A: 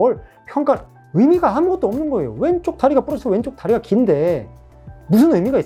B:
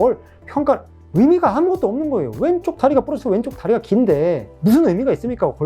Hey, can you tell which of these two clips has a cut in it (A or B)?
B